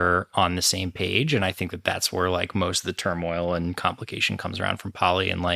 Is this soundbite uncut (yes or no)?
yes